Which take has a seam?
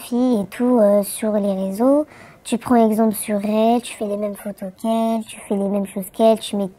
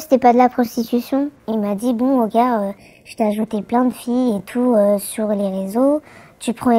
second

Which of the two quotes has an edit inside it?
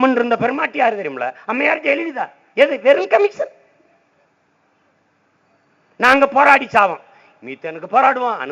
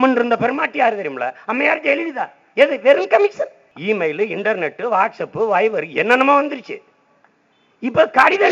second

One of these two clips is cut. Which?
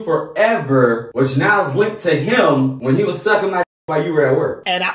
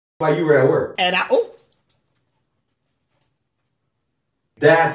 first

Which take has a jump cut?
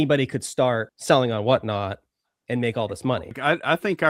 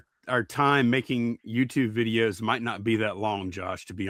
first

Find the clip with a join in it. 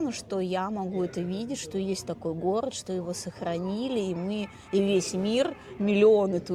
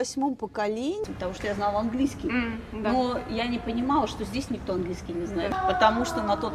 second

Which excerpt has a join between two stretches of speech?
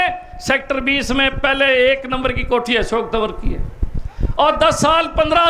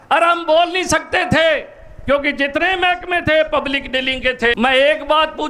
second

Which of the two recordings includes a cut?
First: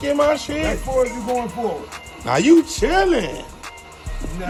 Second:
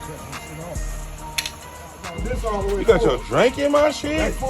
second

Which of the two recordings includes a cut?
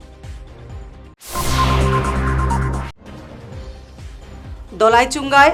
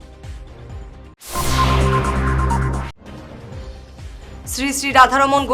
second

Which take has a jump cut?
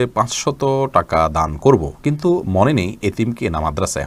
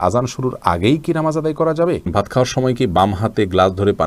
second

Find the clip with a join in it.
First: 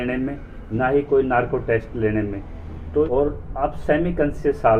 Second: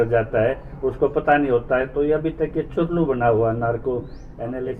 first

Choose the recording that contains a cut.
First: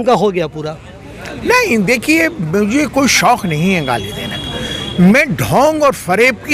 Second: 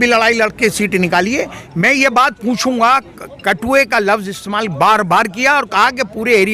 second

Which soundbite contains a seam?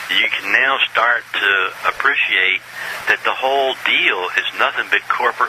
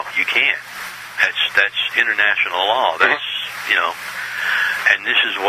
first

